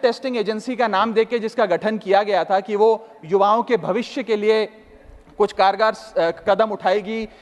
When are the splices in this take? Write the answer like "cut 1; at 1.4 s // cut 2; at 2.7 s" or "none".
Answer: none